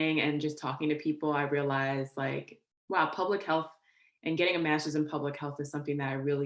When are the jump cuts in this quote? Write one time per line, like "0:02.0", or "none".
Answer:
none